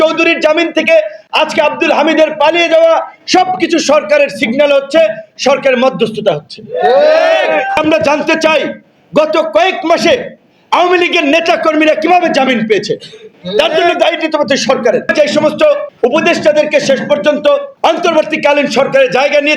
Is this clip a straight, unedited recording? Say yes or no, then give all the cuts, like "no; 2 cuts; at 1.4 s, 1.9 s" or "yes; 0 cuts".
no; 4 cuts; at 7.8 s, 15.1 s, 15.9 s, 17.7 s